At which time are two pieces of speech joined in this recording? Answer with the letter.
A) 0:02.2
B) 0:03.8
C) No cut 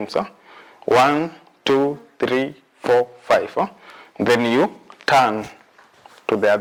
C